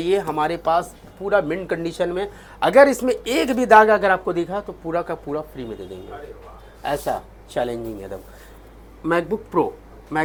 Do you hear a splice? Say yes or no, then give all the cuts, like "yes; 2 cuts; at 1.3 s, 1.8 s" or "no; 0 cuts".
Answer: no; 0 cuts